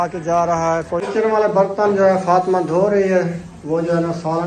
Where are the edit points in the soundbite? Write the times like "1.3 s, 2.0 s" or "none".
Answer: 1.0 s

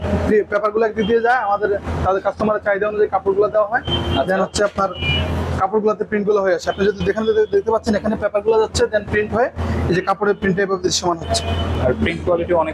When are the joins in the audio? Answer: 11.7 s

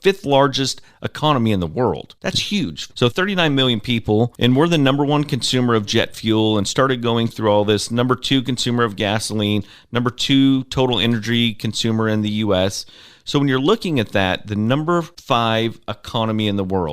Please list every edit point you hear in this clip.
2.8 s, 15.2 s

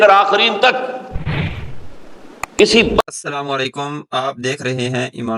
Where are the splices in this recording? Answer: 3.0 s

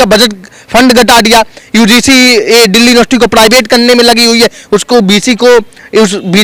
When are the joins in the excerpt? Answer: none

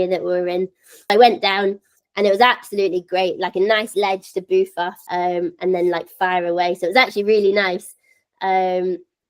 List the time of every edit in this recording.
1.1 s

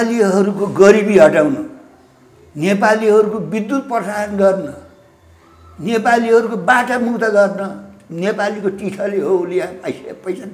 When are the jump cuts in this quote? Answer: none

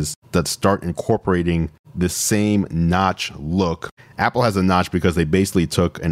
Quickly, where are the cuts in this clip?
3.9 s

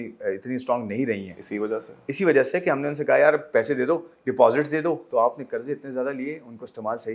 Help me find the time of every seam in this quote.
5.0 s

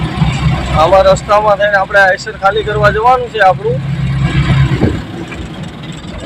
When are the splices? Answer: none

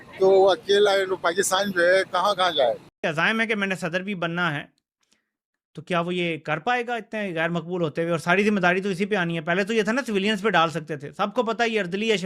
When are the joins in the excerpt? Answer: 2.9 s

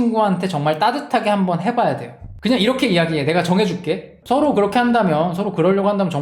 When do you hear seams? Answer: 4.1 s

